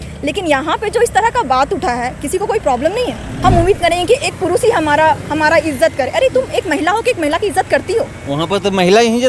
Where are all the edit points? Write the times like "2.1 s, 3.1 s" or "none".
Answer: 3.3 s